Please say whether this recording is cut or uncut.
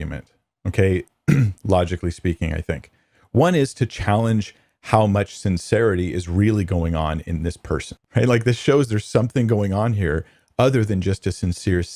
cut